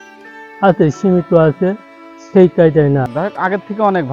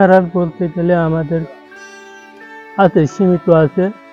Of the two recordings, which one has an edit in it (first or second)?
first